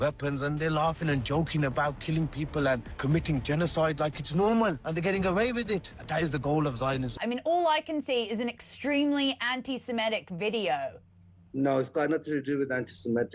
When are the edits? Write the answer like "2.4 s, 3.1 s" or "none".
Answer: 7.2 s